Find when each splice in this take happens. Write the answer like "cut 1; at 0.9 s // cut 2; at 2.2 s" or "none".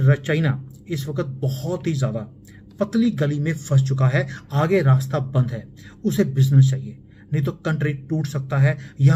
none